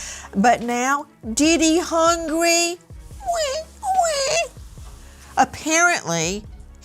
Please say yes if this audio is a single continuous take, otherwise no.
yes